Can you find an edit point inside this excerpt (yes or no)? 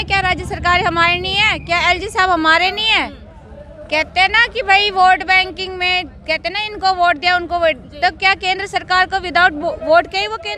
no